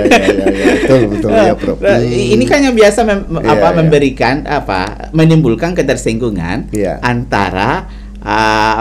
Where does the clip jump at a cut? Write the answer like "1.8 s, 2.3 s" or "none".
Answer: none